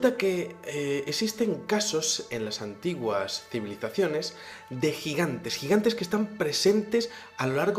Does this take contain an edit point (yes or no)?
yes